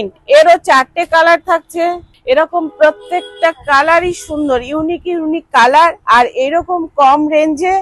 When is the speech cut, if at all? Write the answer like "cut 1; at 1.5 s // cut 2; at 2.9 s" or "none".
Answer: cut 1; at 2.1 s